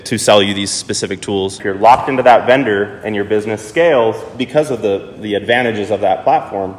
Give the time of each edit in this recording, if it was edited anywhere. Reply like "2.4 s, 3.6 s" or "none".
1.6 s